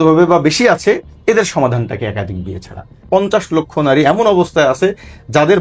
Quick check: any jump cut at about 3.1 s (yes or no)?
yes